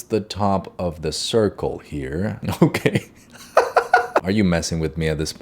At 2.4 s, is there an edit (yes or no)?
yes